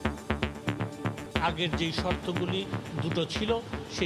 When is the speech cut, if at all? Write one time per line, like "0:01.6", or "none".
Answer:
0:01.3